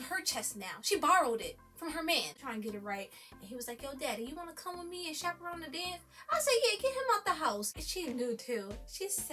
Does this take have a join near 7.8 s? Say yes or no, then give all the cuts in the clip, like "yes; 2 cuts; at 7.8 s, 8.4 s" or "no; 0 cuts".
yes; 2 cuts; at 2.3 s, 7.8 s